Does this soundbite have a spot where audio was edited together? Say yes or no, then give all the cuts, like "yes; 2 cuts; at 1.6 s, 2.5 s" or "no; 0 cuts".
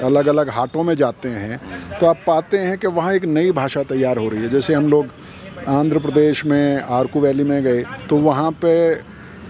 no; 0 cuts